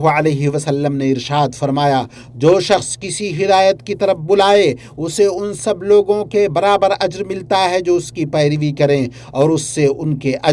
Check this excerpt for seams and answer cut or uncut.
uncut